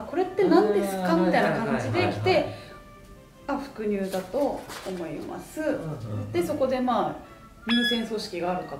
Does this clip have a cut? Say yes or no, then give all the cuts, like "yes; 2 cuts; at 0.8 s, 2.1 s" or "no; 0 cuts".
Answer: no; 0 cuts